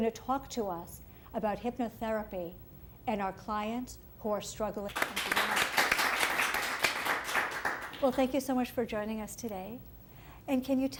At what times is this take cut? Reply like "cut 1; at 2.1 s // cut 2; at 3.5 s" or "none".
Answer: none